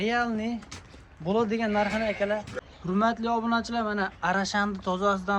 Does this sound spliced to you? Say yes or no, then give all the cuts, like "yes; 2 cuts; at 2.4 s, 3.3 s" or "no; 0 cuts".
yes; 1 cut; at 2.6 s